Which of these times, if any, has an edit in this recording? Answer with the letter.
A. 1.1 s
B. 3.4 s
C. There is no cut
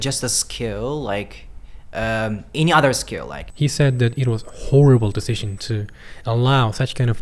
B